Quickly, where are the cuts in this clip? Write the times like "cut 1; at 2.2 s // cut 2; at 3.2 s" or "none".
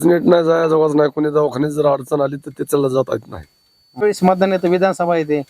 cut 1; at 4.0 s